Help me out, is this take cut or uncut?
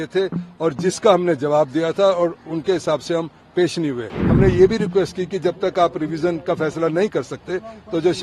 cut